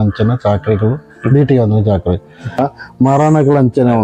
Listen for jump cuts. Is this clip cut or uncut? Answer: cut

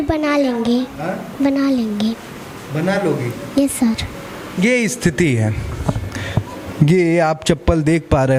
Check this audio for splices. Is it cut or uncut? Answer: uncut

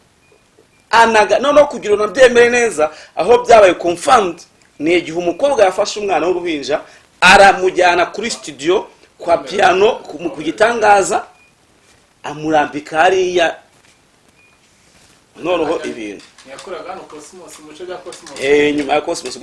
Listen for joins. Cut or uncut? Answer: uncut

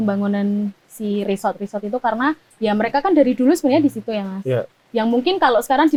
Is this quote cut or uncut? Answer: uncut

